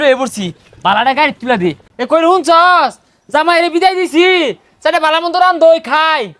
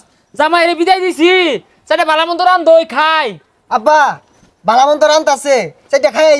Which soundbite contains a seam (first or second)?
first